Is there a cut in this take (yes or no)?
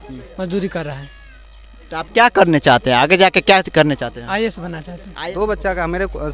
yes